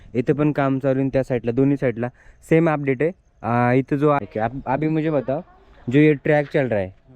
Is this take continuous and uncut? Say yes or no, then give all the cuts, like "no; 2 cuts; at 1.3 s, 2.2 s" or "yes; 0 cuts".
no; 1 cut; at 4.2 s